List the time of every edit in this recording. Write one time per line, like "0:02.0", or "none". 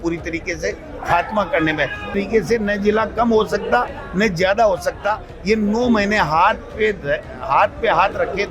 0:02.2